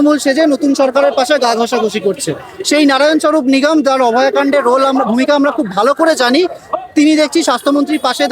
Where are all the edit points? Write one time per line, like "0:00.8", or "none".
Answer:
none